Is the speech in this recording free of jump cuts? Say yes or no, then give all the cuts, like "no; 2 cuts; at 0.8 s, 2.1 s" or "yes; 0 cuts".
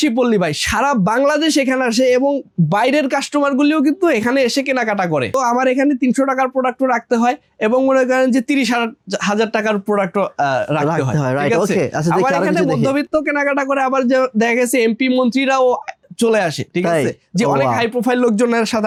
yes; 0 cuts